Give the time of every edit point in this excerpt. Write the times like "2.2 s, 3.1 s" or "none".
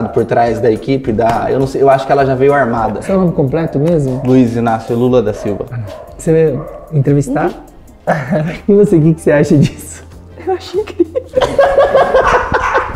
3.0 s, 8.5 s